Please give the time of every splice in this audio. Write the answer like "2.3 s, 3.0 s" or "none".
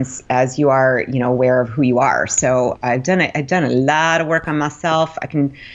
none